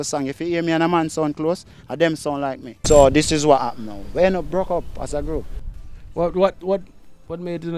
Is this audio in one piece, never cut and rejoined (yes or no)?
no